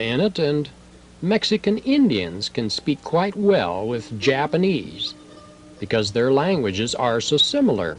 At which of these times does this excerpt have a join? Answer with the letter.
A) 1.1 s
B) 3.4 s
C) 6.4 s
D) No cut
B